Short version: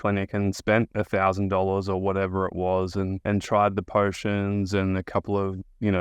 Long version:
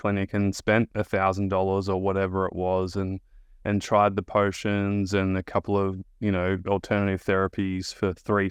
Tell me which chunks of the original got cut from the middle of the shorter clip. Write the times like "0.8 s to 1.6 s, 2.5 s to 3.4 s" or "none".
3.2 s to 3.6 s